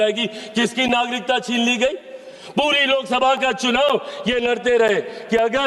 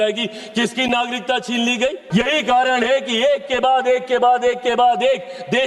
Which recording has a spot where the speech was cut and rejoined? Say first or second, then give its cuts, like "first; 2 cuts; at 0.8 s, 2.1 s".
second; 1 cut; at 2.0 s